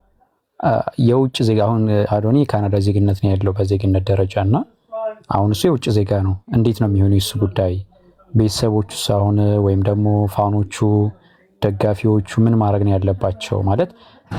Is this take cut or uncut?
uncut